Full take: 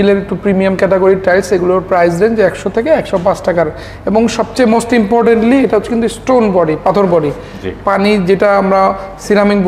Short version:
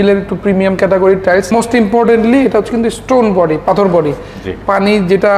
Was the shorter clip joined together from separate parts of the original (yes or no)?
yes